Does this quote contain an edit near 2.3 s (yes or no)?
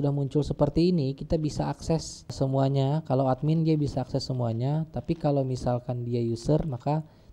yes